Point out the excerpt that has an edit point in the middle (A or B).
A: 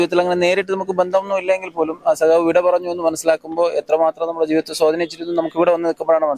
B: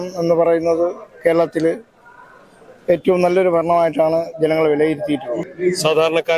B